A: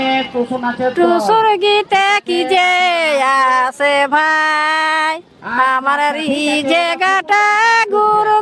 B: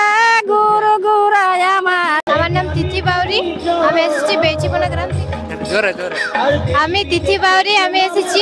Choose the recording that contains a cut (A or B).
B